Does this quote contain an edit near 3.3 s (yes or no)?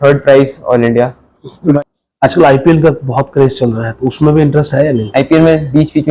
no